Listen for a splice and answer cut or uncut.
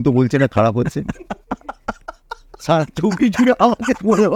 uncut